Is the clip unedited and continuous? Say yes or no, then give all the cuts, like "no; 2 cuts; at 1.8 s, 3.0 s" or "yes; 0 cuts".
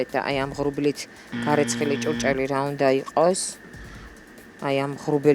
yes; 0 cuts